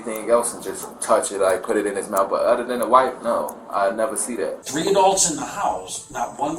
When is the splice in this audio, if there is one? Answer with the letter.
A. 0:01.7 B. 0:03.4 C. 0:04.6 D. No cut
C